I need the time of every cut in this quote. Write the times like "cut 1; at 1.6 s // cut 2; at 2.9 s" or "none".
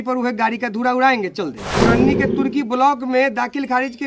cut 1; at 1.7 s